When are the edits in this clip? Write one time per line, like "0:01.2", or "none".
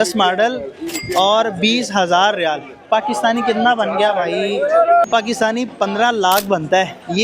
0:05.1